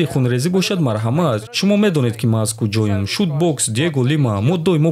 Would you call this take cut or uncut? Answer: uncut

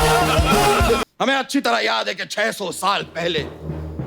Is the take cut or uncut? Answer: cut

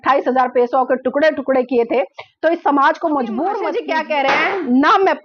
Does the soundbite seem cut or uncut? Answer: cut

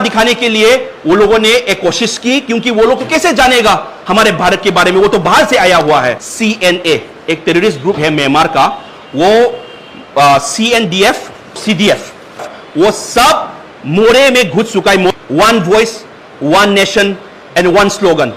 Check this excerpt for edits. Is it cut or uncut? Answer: cut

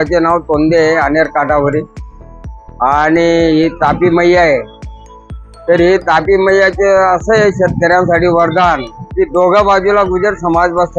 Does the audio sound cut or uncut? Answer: uncut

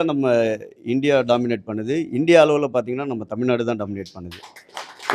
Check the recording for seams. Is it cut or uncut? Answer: uncut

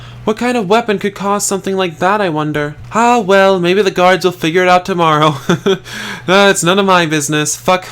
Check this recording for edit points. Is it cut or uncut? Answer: cut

